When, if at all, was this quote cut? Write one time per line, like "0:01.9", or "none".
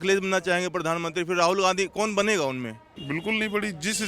0:02.9